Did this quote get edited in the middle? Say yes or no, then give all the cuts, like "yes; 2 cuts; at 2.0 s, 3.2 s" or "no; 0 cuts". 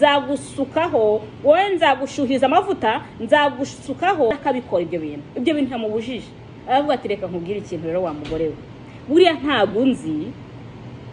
yes; 1 cut; at 4.4 s